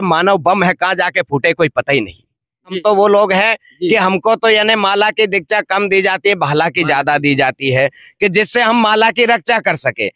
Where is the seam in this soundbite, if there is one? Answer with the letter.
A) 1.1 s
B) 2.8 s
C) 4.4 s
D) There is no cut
B